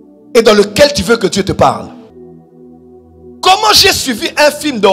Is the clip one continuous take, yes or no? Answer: no